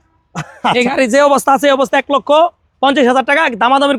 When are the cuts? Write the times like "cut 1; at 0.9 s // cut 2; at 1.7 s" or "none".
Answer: none